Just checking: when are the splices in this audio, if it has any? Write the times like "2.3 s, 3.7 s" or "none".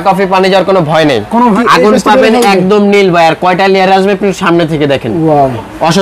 1.6 s